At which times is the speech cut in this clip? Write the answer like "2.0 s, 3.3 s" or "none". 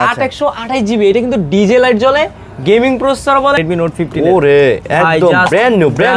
3.6 s